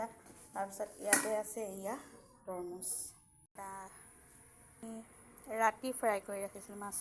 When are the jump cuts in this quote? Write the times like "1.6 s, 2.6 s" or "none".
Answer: 3.5 s